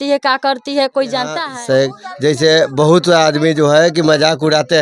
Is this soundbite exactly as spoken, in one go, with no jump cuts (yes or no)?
no